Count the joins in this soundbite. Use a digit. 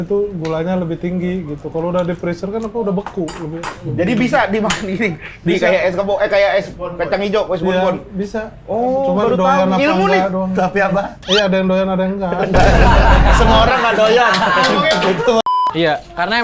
1